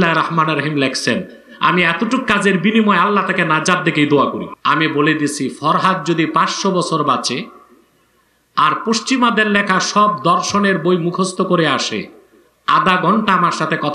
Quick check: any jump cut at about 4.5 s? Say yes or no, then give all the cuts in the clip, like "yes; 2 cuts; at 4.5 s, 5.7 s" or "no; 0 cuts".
yes; 1 cut; at 4.5 s